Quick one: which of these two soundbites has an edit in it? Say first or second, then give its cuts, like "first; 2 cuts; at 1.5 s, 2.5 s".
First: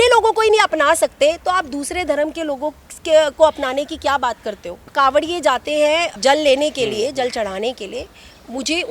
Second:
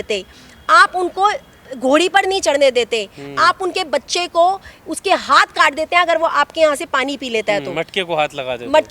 first; 2 cuts; at 4.9 s, 6.2 s